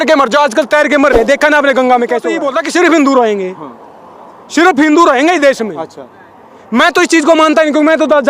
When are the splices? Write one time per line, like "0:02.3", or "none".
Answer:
0:02.5